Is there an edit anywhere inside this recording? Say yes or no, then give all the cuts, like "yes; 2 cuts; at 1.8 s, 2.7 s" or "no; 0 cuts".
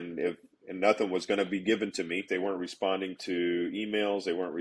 yes; 1 cut; at 2.3 s